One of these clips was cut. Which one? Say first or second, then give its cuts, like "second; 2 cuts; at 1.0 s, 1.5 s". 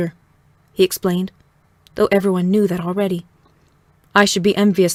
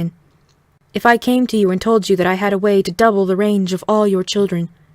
second; 1 cut; at 2.9 s